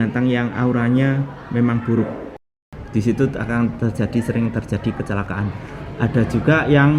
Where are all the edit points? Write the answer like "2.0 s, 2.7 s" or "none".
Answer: 2.4 s